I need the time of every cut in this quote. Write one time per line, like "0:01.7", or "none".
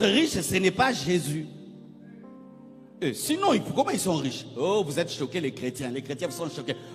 none